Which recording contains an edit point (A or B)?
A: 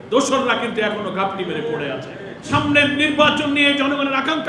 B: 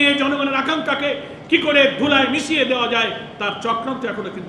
A